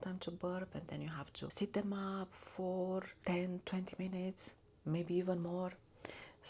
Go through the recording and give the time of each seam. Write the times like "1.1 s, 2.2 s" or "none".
1.5 s, 3.1 s